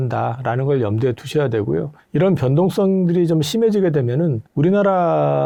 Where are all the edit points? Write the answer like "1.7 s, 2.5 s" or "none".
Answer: none